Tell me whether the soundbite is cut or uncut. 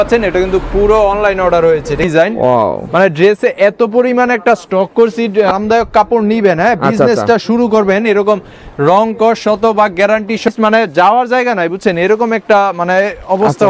cut